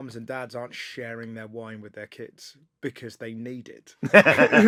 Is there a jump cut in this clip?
no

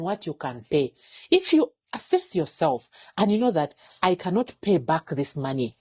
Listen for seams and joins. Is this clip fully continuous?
yes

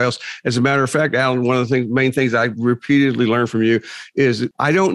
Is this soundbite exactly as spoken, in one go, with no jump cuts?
no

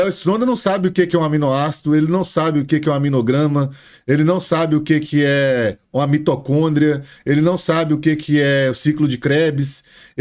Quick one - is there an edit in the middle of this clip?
no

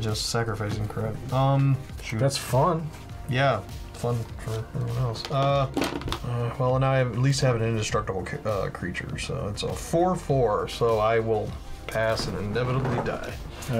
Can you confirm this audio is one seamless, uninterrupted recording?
yes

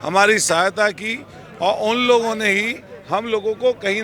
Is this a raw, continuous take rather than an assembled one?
yes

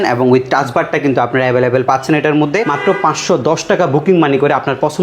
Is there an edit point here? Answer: yes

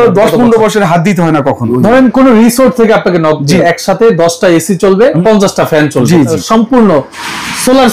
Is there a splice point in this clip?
yes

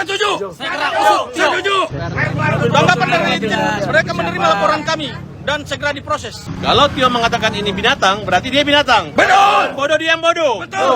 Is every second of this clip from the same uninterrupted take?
no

